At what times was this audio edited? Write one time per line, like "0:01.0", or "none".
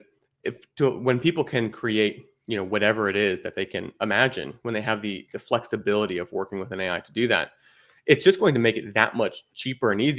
none

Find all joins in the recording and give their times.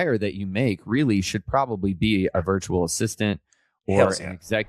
none

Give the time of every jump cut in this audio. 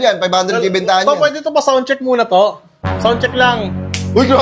none

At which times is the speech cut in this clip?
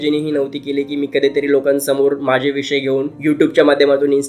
none

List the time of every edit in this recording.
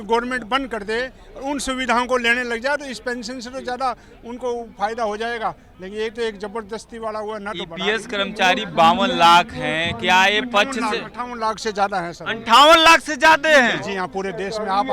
none

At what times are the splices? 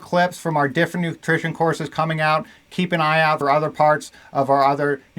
0:03.4

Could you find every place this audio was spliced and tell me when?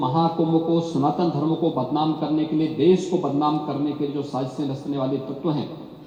none

